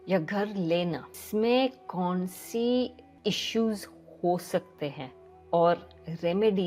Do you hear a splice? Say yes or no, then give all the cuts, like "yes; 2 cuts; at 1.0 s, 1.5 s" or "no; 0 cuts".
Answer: yes; 2 cuts; at 1.2 s, 3.0 s